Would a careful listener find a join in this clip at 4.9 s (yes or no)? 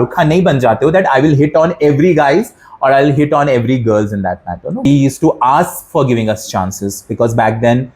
yes